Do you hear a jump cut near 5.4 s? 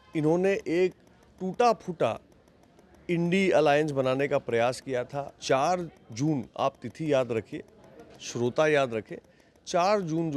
yes; 1 cut; at 5.4 s

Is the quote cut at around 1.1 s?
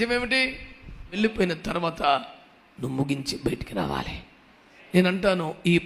yes; 1 cut; at 1.1 s

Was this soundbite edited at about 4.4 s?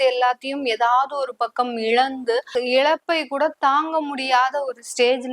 no; 1 cut; at 2.5 s

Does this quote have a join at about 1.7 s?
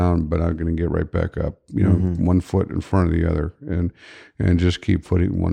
no; 0 cuts

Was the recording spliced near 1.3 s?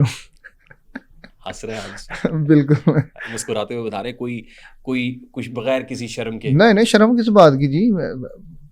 no; 0 cuts

